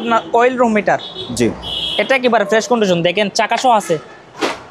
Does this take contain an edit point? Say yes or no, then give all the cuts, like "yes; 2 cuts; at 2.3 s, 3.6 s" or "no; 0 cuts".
no; 0 cuts